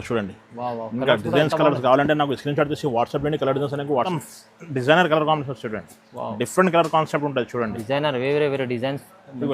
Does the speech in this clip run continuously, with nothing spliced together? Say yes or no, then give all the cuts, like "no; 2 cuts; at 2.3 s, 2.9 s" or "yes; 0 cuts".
no; 1 cut; at 4.2 s